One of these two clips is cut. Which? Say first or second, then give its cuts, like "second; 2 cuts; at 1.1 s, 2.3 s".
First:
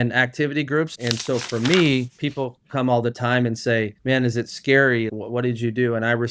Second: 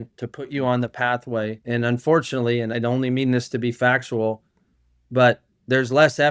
first; 1 cut; at 0.9 s